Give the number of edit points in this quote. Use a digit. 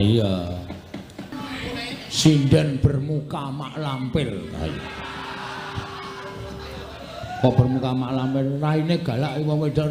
1